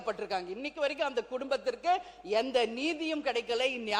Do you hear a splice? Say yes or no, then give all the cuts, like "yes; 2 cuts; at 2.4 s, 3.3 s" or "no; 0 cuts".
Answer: no; 0 cuts